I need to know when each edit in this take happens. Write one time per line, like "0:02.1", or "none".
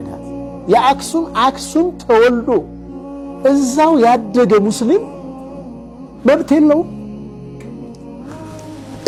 none